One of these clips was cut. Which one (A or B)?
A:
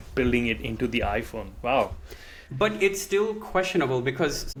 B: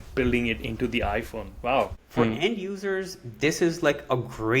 B